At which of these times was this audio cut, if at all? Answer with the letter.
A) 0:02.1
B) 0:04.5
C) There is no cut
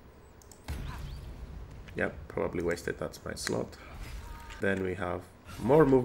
B